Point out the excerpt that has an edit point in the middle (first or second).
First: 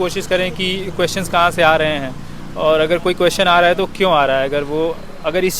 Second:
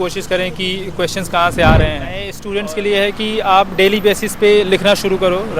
second